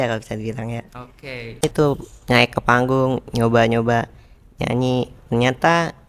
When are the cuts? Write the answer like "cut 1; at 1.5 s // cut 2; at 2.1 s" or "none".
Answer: cut 1; at 1.6 s